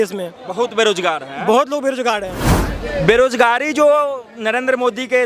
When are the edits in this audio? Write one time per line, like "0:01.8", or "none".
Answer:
0:02.4